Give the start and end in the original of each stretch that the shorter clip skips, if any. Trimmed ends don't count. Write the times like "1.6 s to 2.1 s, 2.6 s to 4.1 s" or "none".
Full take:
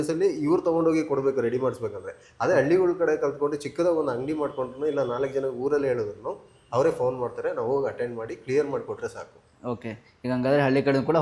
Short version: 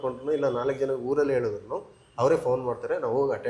none